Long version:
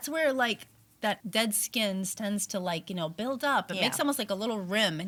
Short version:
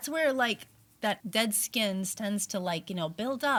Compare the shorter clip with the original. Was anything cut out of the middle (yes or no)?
no